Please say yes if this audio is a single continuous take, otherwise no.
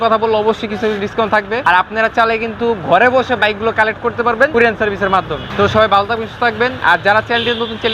no